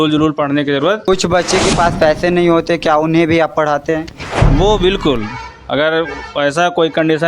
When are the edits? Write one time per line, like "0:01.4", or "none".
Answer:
0:01.1